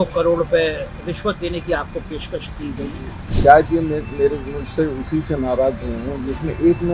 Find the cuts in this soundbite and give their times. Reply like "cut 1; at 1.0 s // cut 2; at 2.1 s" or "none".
cut 1; at 3.3 s